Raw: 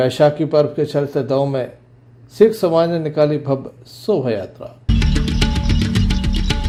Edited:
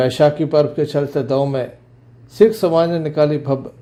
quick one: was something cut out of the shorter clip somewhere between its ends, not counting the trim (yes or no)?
no